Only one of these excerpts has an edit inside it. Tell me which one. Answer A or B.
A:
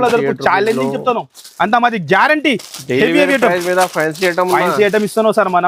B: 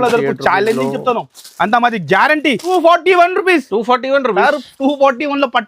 B